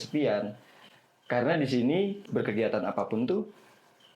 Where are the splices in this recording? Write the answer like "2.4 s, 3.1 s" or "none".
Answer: 2.2 s

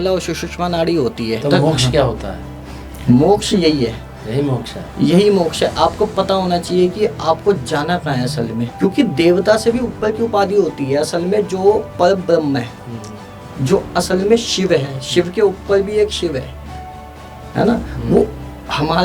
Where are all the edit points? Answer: 1.4 s, 8.7 s

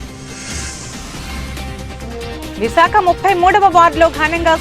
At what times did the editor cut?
1.6 s

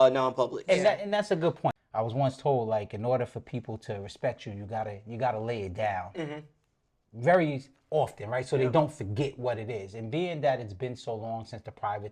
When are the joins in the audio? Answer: 1.8 s

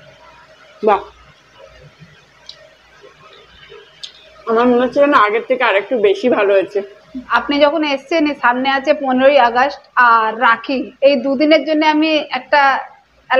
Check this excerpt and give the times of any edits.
7.3 s

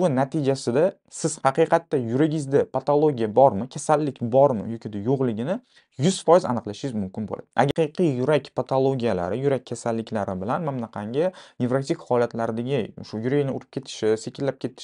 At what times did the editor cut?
7.7 s

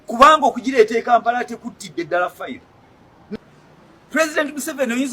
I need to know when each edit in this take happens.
3.4 s

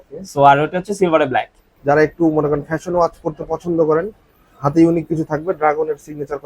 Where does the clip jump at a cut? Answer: 1.5 s

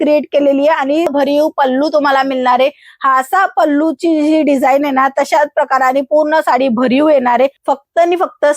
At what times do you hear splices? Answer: 1.1 s, 7.6 s

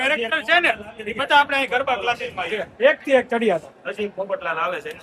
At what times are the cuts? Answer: none

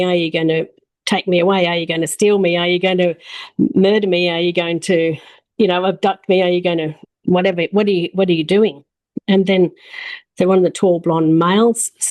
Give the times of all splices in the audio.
7.0 s

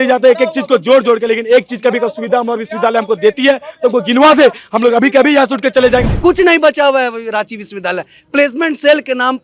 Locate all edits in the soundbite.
6.0 s

